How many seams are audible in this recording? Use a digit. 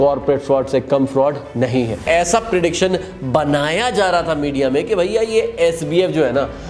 1